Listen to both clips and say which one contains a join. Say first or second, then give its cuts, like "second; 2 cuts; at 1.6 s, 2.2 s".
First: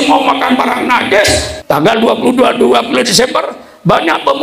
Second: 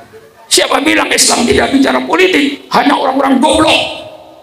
first; 1 cut; at 1.5 s